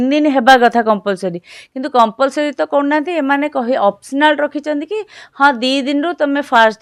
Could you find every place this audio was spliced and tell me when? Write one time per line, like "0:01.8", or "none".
none